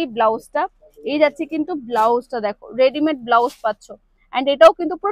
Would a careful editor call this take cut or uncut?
uncut